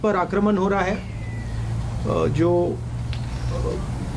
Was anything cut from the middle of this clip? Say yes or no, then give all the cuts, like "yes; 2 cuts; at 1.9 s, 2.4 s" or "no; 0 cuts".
no; 0 cuts